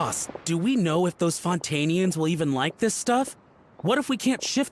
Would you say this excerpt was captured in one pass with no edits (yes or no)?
yes